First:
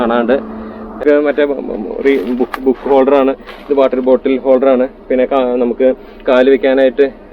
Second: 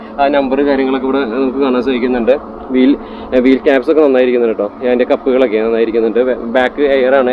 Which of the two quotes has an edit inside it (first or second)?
first